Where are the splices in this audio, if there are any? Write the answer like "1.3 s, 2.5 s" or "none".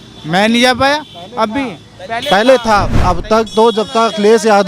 2.9 s